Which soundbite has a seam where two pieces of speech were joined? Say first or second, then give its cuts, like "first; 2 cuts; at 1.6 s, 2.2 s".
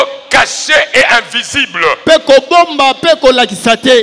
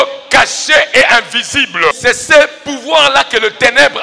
second; 1 cut; at 2.0 s